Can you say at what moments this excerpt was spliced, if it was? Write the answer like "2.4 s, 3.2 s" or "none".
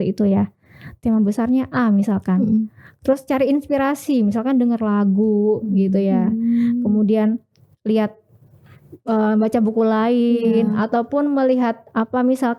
none